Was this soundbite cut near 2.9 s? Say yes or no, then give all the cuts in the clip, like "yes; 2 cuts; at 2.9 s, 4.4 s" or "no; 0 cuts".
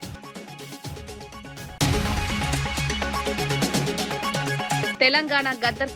no; 1 cut; at 1.5 s